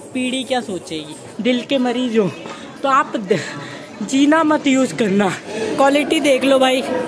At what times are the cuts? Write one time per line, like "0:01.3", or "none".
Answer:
0:01.2
0:05.5